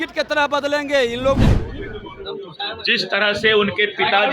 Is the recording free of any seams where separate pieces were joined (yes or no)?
no